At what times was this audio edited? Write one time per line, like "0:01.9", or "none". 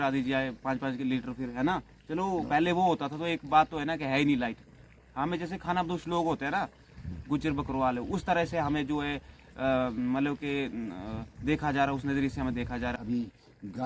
0:12.9

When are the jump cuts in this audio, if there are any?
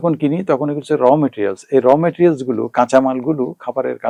none

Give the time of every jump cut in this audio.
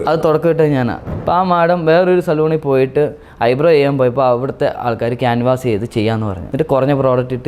0:01.0
0:06.4

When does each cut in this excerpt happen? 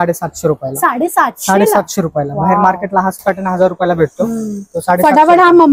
none

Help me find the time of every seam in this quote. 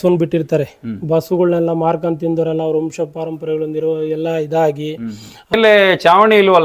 0:05.5

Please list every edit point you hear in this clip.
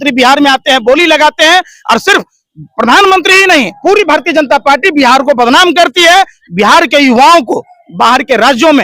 none

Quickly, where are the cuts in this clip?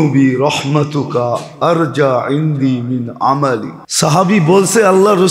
0:03.8

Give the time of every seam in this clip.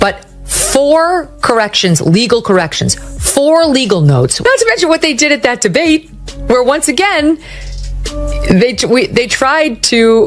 0:04.4

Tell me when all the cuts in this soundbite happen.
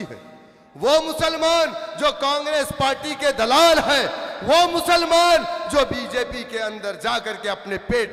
none

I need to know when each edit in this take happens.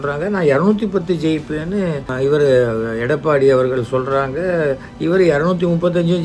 0:02.1
0:04.9

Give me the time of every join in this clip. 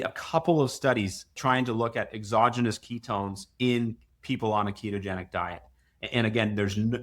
0:01.3

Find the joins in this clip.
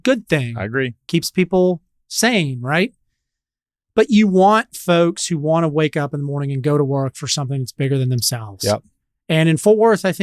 none

